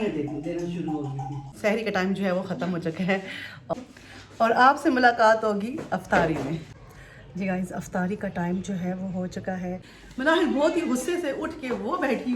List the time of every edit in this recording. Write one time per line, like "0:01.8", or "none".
0:01.5
0:03.7
0:09.9